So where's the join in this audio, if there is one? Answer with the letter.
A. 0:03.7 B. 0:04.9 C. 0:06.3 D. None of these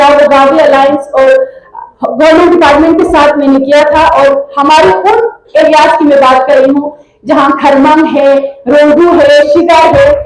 D